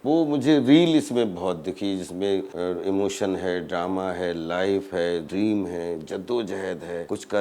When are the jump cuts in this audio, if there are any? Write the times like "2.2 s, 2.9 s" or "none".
none